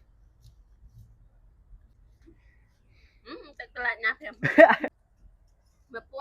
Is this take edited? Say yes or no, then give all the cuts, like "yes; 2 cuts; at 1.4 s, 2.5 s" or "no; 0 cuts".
yes; 2 cuts; at 2.0 s, 4.9 s